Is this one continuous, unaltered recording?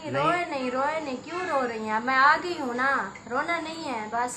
yes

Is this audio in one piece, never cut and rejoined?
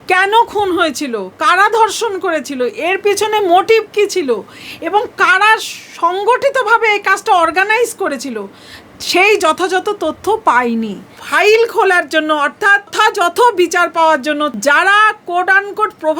no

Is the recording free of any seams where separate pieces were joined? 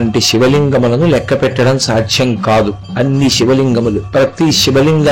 no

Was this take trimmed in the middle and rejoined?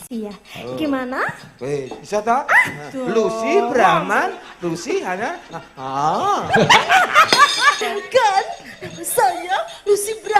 yes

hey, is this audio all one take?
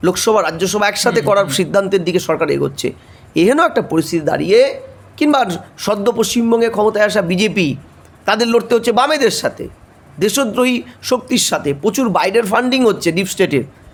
yes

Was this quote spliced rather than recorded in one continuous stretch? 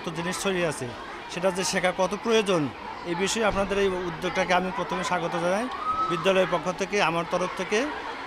no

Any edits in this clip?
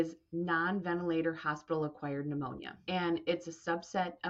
yes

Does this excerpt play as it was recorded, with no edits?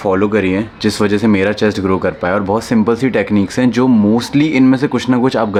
yes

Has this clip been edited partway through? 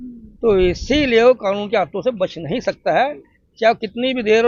no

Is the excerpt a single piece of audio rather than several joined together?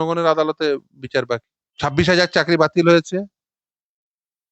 no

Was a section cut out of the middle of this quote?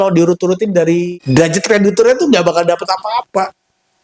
yes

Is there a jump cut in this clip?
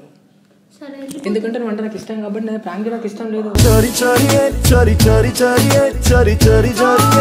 no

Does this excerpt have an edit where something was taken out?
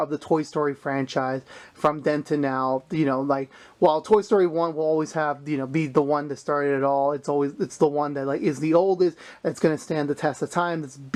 no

